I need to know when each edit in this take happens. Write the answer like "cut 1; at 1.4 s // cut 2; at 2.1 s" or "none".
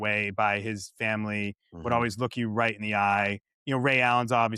none

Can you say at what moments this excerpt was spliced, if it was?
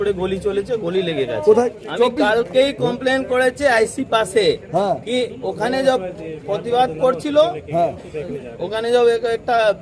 cut 1; at 1.7 s

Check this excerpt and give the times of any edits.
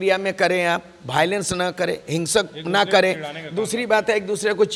none

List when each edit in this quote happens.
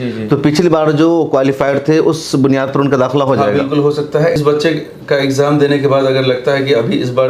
cut 1; at 4.4 s

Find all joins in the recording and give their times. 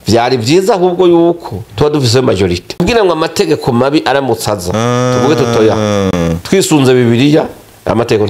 cut 1; at 2.8 s

